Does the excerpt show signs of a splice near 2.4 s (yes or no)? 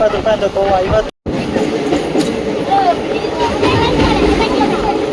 no